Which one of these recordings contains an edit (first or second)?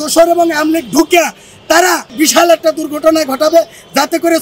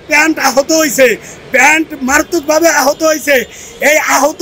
first